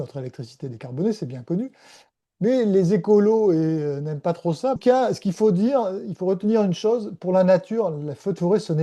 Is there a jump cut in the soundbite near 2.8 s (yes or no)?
no